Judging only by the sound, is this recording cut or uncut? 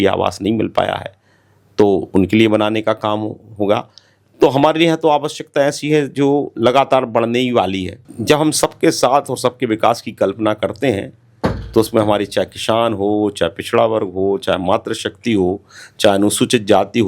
cut